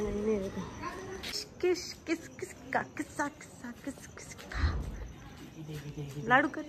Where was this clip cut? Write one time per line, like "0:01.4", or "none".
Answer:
0:01.3